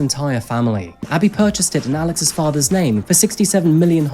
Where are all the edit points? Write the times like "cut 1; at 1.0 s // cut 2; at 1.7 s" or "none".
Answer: cut 1; at 1.1 s // cut 2; at 3.0 s